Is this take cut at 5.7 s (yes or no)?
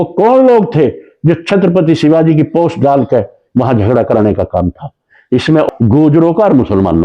yes